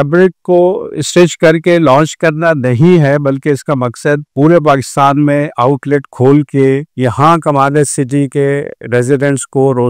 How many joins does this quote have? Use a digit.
0